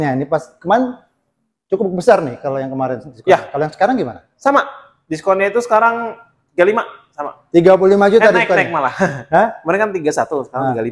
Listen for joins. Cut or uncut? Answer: uncut